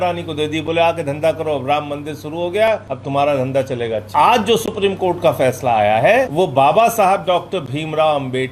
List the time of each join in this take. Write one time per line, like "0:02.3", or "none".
0:02.9
0:04.1
0:06.3